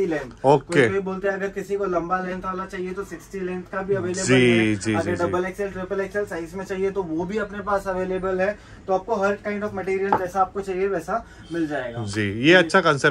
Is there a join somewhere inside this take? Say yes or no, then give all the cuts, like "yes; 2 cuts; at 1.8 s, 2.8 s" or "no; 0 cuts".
no; 0 cuts